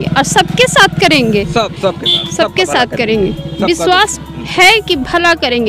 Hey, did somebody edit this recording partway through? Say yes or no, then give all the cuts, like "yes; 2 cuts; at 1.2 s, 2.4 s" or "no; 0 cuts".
no; 0 cuts